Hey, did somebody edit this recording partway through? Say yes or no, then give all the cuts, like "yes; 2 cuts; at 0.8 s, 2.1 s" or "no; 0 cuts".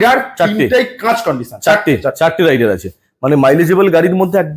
no; 0 cuts